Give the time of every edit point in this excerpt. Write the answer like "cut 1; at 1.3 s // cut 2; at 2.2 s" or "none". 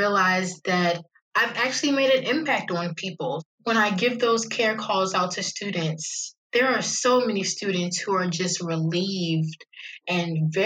cut 1; at 1.1 s // cut 2; at 3.5 s